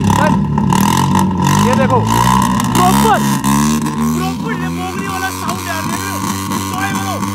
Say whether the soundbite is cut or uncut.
uncut